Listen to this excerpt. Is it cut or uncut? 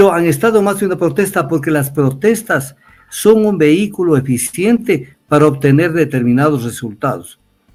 uncut